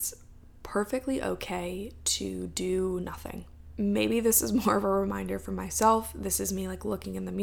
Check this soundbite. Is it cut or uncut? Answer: uncut